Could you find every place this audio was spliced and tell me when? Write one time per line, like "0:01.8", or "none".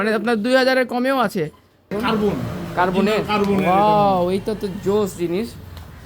0:01.9

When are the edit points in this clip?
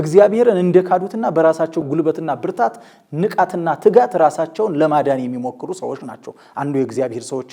0:01.9

